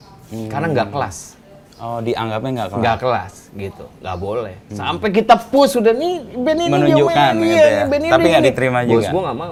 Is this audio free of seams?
yes; 0 cuts

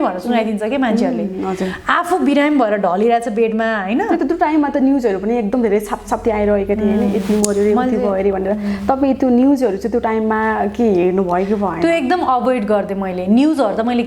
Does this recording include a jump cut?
no; 0 cuts

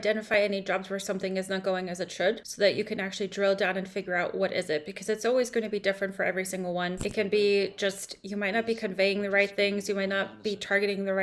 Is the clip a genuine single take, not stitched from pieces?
no; 2 cuts; at 2.5 s, 7.0 s

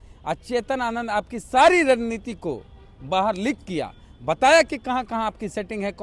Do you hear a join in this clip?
no; 0 cuts

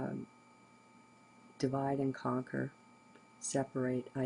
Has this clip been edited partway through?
no; 0 cuts

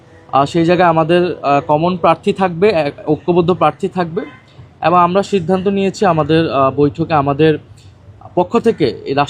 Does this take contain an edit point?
no; 0 cuts

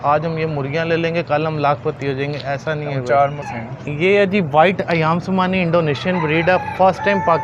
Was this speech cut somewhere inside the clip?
yes; 1 cut; at 3.5 s

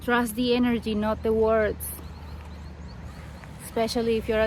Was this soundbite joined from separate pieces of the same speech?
no; 0 cuts

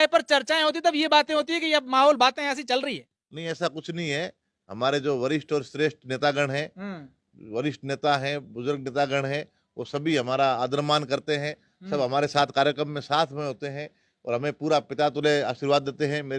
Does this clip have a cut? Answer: no; 0 cuts

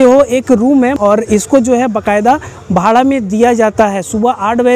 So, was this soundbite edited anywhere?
yes; 1 cut; at 1.0 s

